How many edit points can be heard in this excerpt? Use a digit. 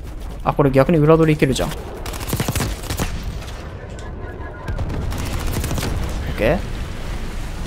0